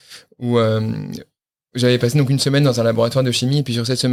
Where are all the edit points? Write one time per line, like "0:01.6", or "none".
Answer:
none